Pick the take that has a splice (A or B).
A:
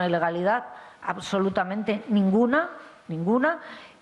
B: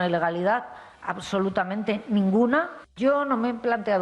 B